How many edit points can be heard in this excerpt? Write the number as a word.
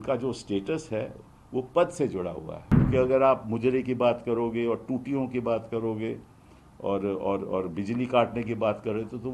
one